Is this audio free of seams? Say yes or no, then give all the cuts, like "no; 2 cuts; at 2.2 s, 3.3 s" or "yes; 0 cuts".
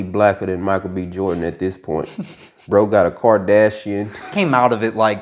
no; 1 cut; at 4.3 s